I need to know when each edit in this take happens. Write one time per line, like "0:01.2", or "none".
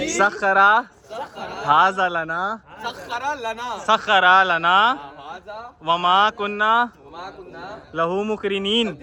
none